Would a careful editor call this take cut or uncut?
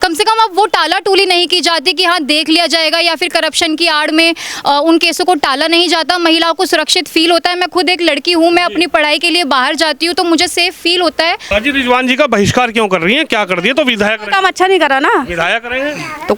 cut